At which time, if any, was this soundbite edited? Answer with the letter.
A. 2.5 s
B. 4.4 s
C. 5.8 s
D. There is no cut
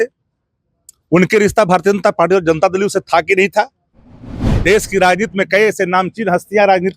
B